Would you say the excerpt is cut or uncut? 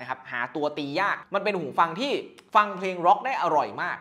cut